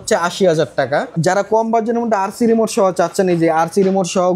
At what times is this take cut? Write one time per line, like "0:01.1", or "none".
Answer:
0:01.1